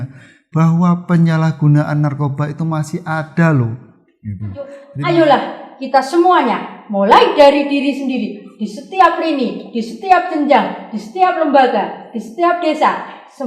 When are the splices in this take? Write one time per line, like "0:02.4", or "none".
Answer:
0:04.8